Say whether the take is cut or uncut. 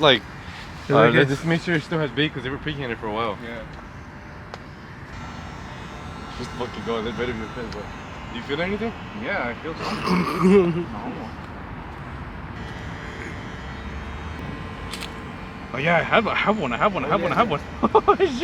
uncut